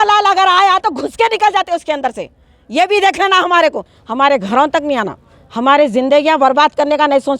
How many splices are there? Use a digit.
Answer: 1